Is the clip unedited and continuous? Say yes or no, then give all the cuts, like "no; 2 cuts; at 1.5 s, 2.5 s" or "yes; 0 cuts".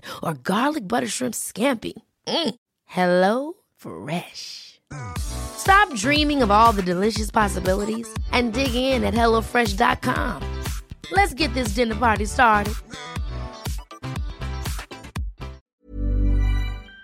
no; 1 cut; at 15.6 s